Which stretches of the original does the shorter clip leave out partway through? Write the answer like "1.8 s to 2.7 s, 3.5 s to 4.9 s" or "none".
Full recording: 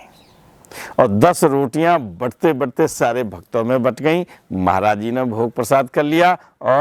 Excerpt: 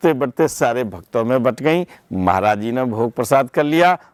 none